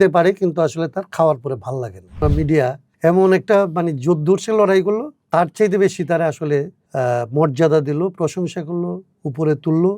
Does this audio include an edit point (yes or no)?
yes